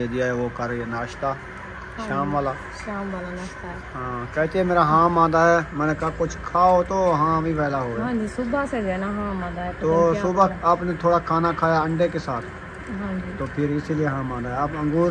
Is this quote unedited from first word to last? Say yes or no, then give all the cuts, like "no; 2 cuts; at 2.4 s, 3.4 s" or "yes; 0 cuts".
yes; 0 cuts